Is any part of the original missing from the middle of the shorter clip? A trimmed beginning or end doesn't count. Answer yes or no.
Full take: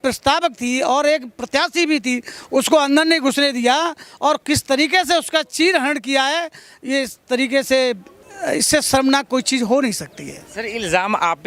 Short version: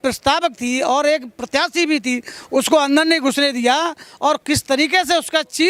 no